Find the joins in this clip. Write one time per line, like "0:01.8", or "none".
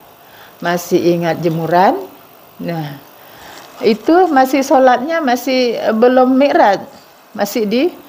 none